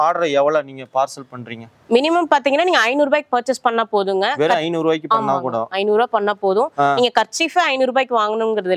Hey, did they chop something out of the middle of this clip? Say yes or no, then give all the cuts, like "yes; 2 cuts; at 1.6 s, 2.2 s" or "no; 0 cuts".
no; 0 cuts